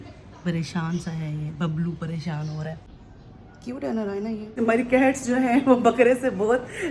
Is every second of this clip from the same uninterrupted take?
no; 2 cuts; at 2.8 s, 4.5 s

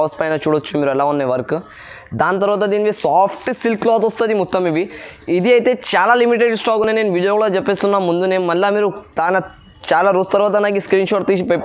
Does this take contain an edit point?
no; 0 cuts

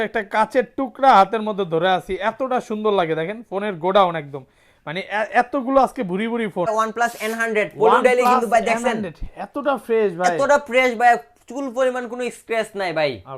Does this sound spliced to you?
yes; 1 cut; at 6.6 s

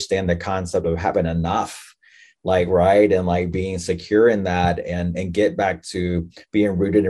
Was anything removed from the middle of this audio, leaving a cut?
no; 0 cuts

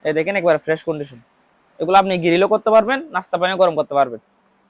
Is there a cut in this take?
no; 0 cuts

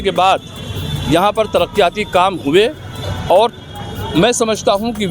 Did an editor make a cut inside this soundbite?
no; 0 cuts

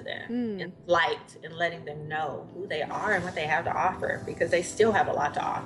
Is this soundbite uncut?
yes; 0 cuts

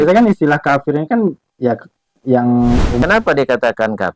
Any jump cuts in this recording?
yes; 1 cut; at 3.0 s

